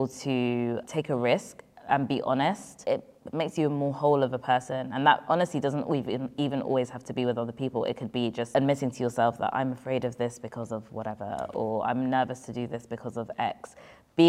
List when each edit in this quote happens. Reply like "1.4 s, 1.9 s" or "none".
0.8 s, 2.7 s, 8.5 s